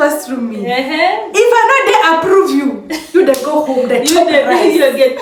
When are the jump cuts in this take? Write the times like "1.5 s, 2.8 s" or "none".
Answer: none